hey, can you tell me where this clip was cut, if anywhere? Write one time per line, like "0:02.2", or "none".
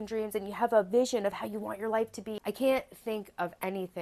0:02.4